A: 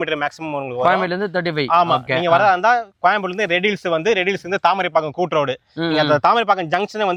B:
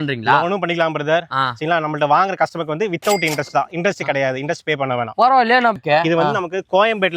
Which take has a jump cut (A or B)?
B